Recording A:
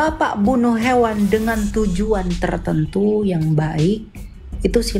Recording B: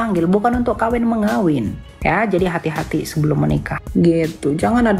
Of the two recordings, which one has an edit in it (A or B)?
B